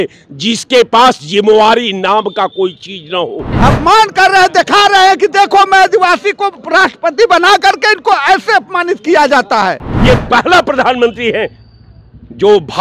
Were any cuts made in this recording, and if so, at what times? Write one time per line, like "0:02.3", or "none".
0:03.5
0:09.9